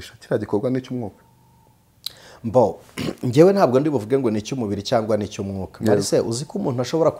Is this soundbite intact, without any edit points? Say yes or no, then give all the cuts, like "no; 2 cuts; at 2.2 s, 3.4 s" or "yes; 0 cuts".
yes; 0 cuts